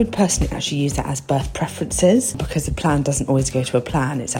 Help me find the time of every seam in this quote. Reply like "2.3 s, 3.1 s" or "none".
2.4 s